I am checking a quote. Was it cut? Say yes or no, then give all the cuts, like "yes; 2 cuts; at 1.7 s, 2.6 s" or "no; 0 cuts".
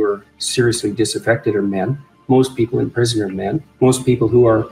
yes; 1 cut; at 3.7 s